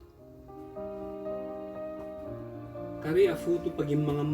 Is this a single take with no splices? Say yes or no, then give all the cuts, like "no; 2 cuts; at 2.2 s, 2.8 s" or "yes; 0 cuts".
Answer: no; 2 cuts; at 0.9 s, 3.0 s